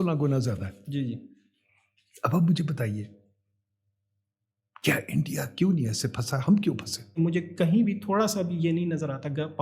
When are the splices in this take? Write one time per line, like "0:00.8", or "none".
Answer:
0:07.1